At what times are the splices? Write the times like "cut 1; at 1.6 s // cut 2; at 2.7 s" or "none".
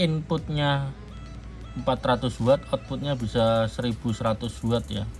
none